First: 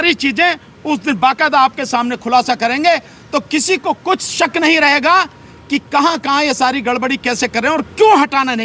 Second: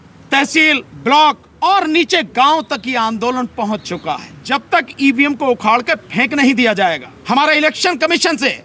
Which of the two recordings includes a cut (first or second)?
second